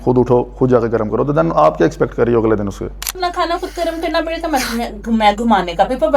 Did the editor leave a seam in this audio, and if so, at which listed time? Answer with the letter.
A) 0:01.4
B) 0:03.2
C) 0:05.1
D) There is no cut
B